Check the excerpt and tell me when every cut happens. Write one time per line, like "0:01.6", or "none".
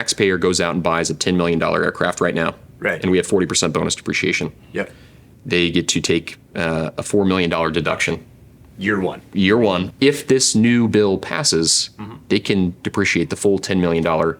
0:09.9